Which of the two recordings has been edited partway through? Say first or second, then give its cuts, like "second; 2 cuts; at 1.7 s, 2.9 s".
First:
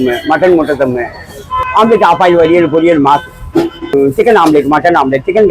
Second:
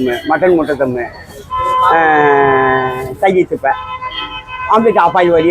first; 2 cuts; at 1.5 s, 3.9 s